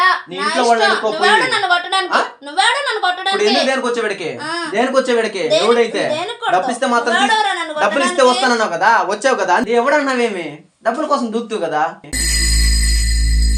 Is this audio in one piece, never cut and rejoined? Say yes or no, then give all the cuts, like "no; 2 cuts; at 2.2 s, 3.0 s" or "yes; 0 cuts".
no; 2 cuts; at 9.6 s, 12.0 s